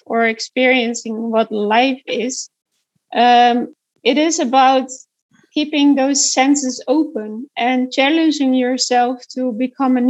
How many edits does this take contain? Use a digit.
0